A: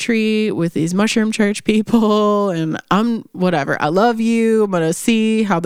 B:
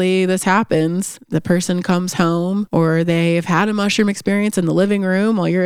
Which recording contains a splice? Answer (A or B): B